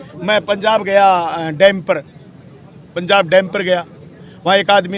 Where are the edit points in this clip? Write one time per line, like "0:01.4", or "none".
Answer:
none